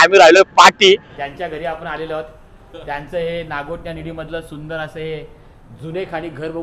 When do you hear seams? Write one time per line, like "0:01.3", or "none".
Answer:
0:01.1